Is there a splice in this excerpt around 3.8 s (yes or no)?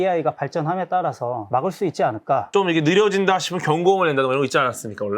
no